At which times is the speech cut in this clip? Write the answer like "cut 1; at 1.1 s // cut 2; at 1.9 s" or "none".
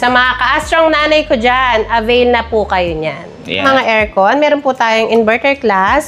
cut 1; at 3.6 s